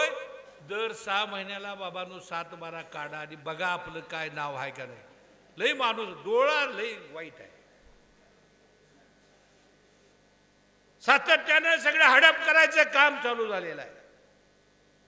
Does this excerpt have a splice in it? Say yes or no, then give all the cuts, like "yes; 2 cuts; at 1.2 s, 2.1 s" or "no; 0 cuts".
no; 0 cuts